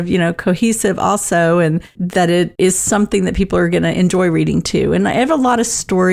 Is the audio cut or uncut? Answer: uncut